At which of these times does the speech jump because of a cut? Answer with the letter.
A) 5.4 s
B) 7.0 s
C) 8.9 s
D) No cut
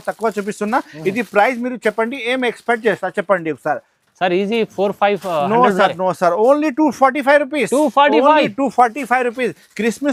D